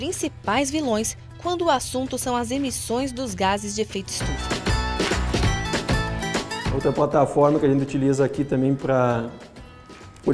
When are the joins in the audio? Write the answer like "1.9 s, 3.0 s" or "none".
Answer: none